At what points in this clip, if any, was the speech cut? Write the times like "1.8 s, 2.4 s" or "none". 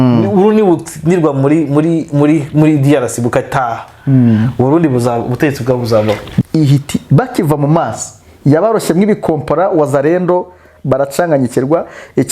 6.4 s

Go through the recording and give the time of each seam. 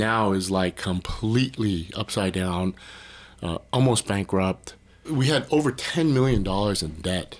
5.1 s

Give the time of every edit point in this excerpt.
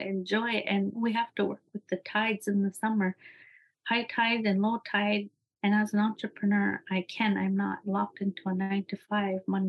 5.3 s

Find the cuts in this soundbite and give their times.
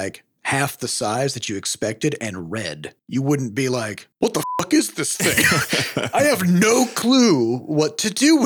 6.9 s

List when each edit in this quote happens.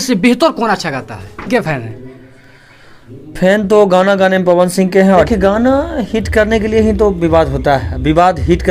1.5 s, 5.3 s

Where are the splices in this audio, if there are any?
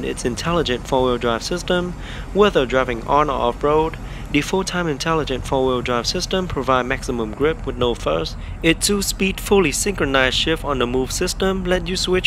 none

